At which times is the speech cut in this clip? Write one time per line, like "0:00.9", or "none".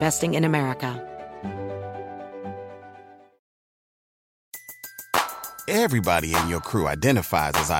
0:01.0